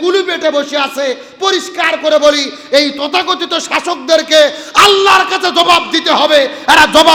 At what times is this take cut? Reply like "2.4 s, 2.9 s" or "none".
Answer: none